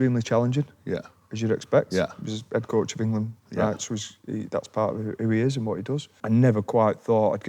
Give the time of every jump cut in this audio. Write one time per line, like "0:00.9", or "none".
0:06.2